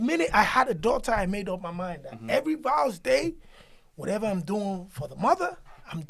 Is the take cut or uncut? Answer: uncut